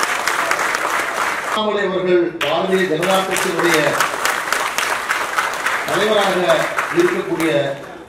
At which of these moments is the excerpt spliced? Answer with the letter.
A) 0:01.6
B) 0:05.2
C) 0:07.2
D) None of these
A